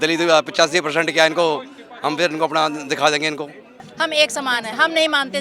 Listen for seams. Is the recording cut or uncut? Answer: cut